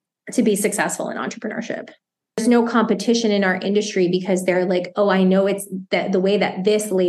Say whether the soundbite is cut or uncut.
cut